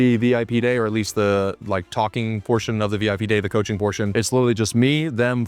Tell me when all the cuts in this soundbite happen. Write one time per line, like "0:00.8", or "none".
0:04.1

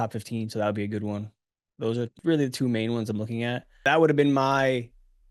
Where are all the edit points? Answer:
0:02.1
0:03.8

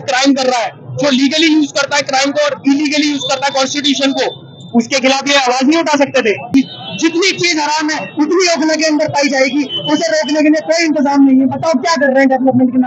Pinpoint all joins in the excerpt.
0:06.5

